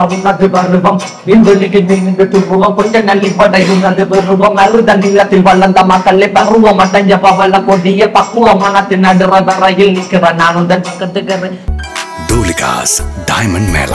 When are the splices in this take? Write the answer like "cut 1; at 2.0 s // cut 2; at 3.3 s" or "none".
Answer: cut 1; at 11.5 s